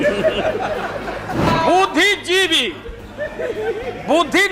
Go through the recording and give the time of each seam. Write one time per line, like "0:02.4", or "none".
0:01.5

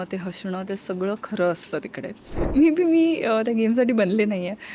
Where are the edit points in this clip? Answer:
0:02.4

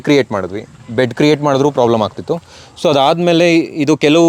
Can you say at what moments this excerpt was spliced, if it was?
none

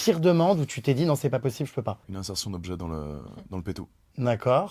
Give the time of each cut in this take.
none

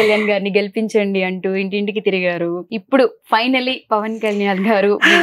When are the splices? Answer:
0:02.7

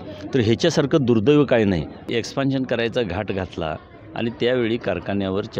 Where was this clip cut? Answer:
0:02.1

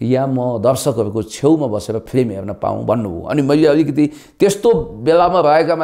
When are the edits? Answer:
none

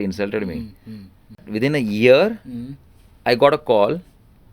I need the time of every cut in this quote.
0:01.5

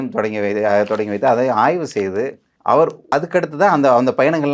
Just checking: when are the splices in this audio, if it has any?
0:02.5
0:03.1

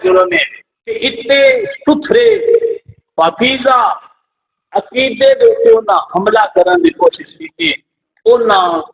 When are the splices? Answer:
0:01.0

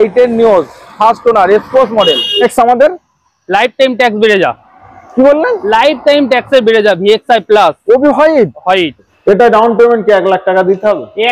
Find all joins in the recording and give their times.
0:02.4
0:09.0

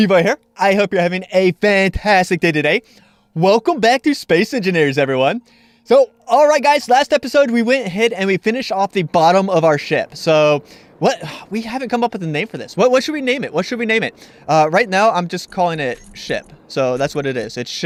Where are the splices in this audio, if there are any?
none

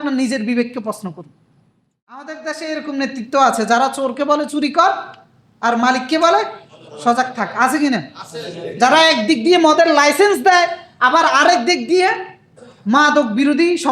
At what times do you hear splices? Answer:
0:02.2

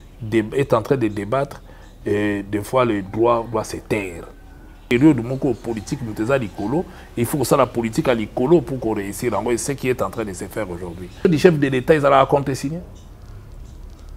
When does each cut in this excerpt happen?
0:04.9
0:11.3

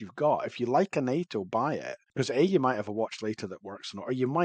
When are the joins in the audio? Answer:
0:02.0

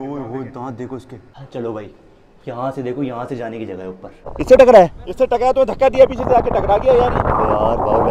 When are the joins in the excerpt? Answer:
0:01.4
0:04.3

